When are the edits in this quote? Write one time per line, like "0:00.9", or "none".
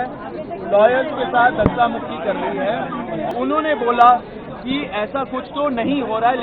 0:03.3

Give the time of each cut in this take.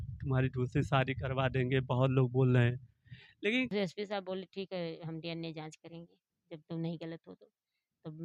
0:03.7

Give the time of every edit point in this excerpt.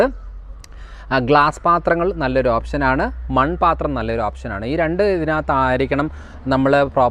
none

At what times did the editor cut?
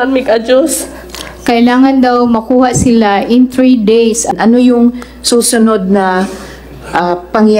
0:04.3

